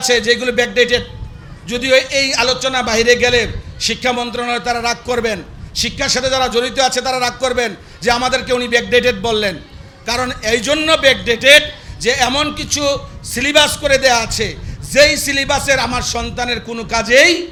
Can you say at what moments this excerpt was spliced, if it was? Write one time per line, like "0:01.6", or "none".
none

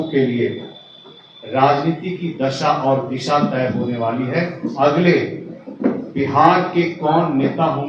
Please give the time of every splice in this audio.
none

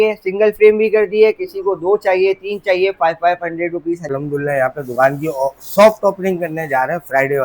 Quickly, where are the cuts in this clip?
0:04.1

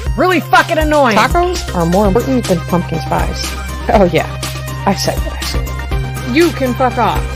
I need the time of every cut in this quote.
0:02.2

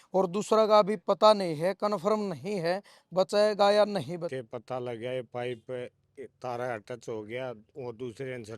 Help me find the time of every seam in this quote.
0:04.3

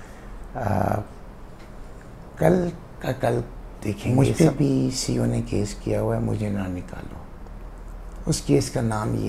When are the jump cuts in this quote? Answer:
0:04.1

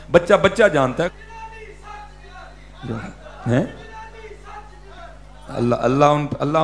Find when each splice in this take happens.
0:01.1

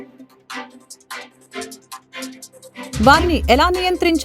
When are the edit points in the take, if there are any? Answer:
0:02.1
0:03.0

